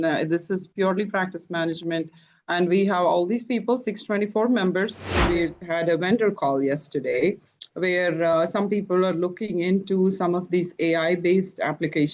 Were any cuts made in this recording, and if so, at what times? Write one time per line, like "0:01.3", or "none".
0:05.2